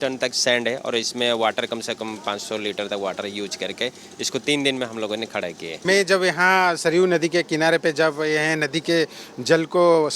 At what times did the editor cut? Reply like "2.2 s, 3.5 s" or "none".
5.8 s